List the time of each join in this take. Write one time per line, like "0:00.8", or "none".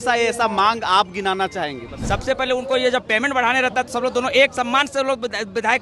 0:01.9